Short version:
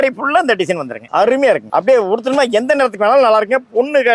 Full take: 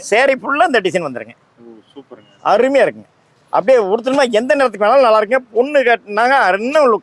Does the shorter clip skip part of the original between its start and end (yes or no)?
yes